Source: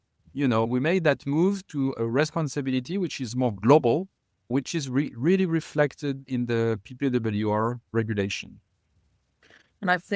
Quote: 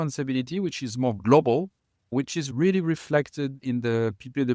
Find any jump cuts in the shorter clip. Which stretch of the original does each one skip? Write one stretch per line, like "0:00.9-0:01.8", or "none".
0:04.9-0:05.1